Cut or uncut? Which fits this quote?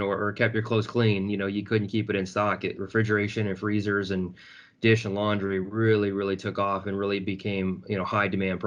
uncut